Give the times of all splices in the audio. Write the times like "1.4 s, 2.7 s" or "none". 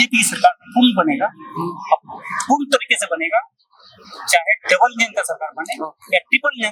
none